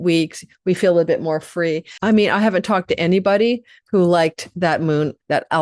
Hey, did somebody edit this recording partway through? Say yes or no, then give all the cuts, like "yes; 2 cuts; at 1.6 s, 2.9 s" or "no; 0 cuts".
yes; 1 cut; at 1.9 s